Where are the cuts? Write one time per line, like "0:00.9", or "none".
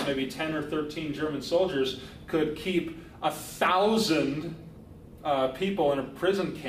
0:00.9